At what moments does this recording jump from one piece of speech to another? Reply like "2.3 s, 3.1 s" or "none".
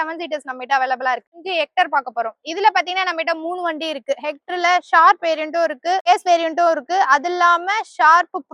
1.4 s, 6.1 s